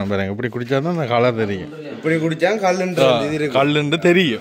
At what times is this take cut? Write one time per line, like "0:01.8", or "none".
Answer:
none